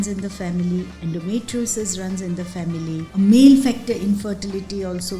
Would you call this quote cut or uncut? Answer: cut